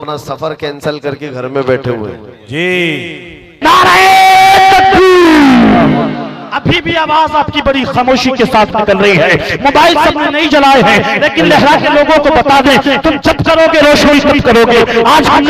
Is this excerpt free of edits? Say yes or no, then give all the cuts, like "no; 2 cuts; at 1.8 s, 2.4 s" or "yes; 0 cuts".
no; 1 cut; at 3.6 s